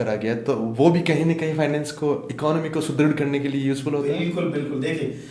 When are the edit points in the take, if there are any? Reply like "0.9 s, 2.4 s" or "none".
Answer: none

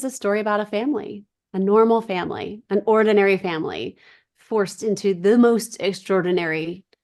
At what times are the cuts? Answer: none

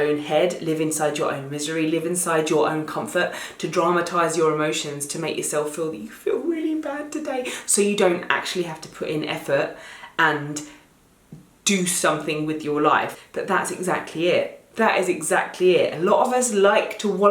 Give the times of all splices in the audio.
13.1 s

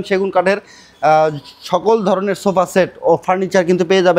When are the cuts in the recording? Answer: none

